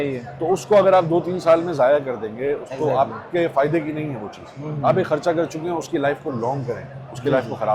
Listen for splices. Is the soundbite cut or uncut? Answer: uncut